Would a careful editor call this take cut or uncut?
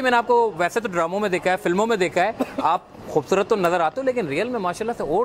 uncut